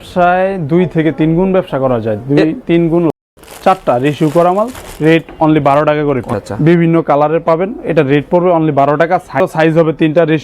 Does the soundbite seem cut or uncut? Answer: cut